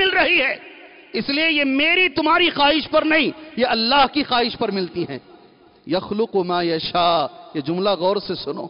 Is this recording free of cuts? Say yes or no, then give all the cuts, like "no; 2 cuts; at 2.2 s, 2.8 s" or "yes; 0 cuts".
yes; 0 cuts